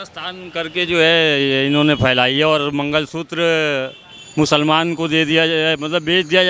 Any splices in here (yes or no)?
no